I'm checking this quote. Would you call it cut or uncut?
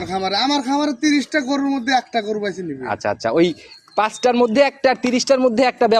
uncut